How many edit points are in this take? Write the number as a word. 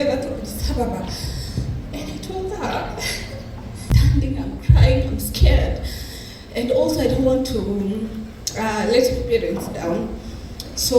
one